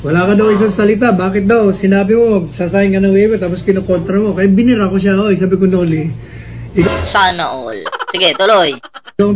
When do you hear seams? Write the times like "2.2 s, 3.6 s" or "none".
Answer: none